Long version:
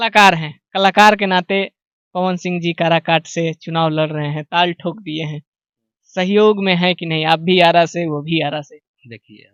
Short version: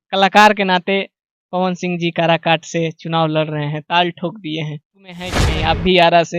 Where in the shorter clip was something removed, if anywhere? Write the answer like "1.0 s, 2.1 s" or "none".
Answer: 5.4 s

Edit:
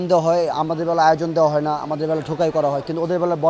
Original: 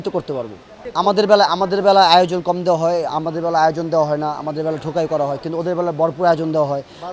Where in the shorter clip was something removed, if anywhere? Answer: none

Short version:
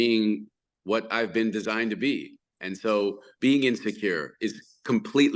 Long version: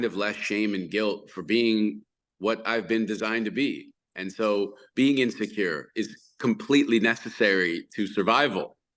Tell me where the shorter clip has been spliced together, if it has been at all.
none

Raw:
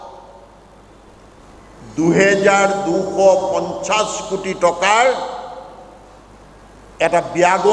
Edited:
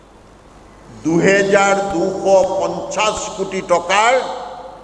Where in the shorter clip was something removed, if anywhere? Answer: none

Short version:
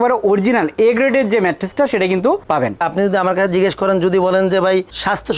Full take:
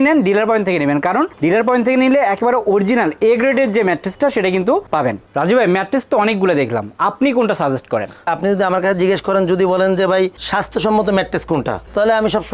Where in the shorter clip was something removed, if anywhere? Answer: 2.8 s

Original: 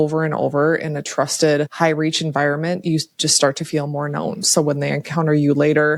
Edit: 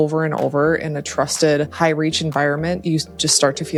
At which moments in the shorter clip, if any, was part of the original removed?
none

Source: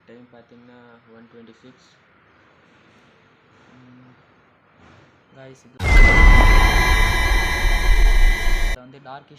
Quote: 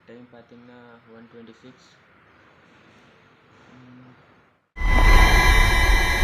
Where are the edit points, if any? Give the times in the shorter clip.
5.0 s

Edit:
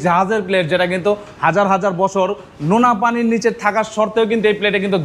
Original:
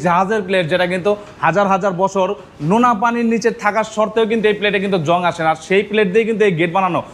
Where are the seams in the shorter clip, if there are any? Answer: none

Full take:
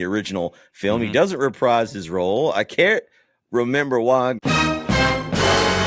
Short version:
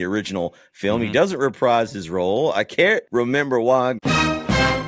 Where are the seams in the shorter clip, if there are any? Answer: 3.1 s

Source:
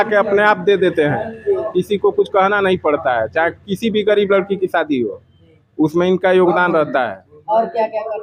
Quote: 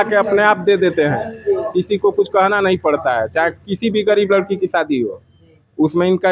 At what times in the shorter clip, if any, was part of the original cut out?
none

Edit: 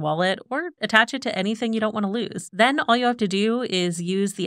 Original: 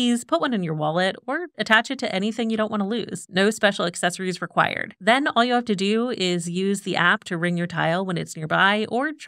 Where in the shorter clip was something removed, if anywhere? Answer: 2.4 s

